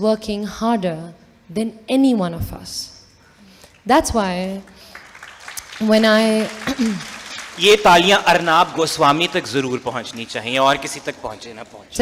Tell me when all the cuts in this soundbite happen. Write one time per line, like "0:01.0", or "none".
none